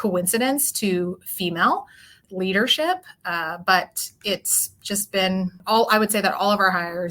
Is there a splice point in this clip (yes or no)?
yes